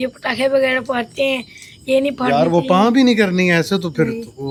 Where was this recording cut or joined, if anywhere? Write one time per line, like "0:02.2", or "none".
none

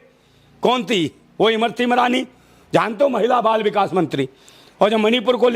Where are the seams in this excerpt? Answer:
none

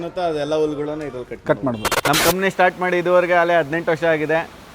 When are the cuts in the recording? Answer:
0:01.9

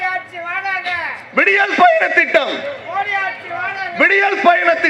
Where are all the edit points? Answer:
none

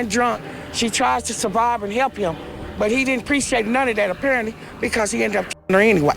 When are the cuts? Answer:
none

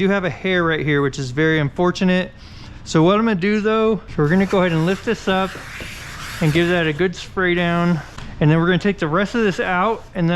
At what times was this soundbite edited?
0:04.1
0:08.2

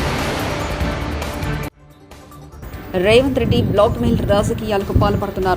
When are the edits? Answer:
0:01.7

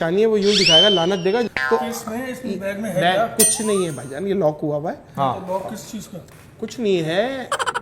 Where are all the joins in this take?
0:01.6

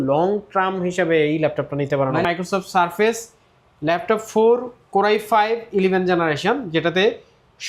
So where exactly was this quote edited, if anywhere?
0:02.2

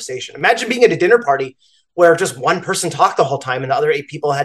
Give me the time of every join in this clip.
none

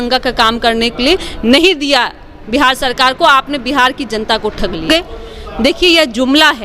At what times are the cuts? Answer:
0:04.9

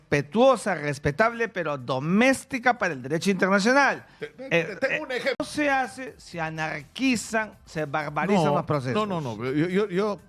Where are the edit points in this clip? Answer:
0:05.5

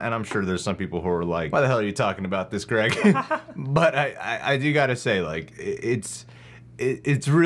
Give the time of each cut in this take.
0:01.5

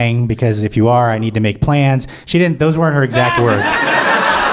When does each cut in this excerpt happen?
none

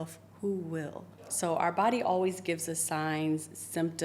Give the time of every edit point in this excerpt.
0:01.1

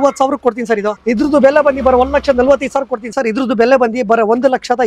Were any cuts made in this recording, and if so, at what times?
0:00.9
0:03.1

